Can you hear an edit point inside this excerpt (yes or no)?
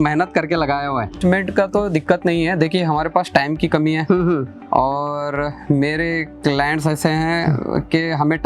yes